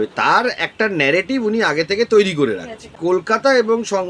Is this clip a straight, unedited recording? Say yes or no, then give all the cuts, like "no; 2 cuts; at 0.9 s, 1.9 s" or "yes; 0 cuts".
no; 1 cut; at 3.0 s